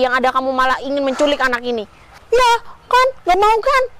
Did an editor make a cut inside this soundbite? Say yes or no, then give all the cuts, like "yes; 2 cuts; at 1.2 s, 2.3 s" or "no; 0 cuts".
no; 0 cuts